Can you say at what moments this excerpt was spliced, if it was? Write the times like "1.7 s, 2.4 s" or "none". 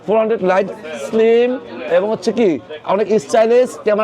none

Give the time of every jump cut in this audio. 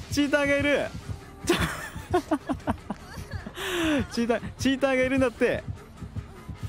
none

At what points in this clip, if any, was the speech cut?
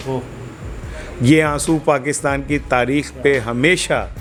none

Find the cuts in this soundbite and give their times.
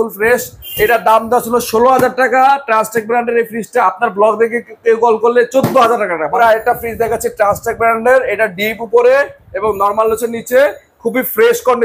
6.4 s

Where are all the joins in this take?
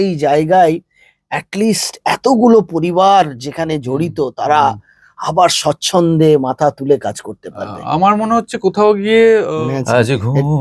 9.5 s

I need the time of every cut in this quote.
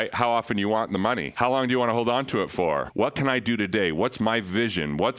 2.9 s

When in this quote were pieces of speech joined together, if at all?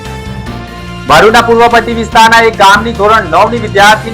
1.0 s

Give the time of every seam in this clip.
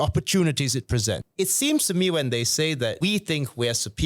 1.2 s, 3.0 s

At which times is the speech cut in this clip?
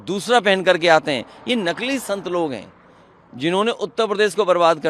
none

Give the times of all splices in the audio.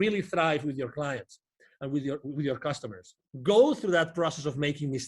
3.3 s

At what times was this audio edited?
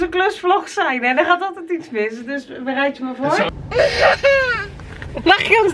3.5 s

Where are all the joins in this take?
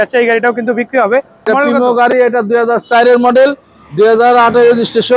1.4 s

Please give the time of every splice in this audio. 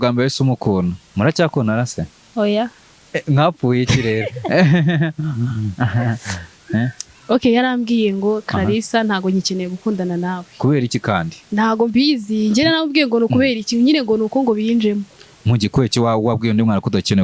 1.0 s, 2.2 s

